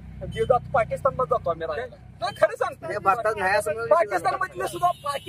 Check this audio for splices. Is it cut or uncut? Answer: cut